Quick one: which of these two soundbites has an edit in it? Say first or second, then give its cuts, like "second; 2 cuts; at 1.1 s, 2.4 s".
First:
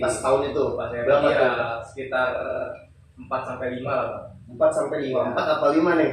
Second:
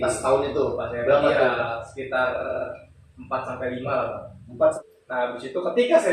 second; 1 cut; at 4.8 s